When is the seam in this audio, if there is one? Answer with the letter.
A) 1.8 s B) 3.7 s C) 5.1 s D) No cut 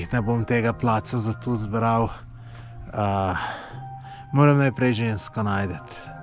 D